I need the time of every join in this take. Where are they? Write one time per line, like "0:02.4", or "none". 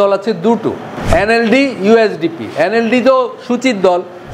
0:00.9